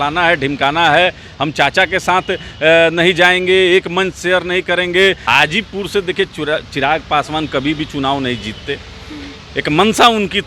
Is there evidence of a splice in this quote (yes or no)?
yes